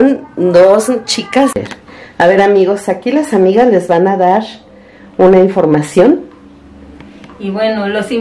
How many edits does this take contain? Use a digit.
1